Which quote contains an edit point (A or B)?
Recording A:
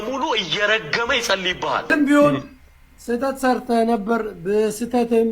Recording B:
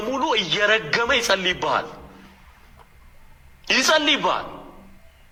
A